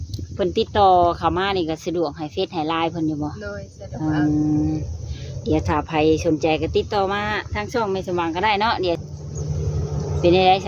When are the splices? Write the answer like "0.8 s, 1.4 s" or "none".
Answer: 9.0 s